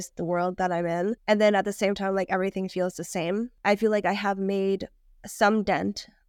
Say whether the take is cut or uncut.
cut